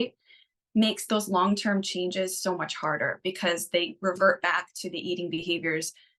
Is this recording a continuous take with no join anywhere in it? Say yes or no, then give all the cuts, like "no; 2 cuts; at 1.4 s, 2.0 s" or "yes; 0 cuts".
yes; 0 cuts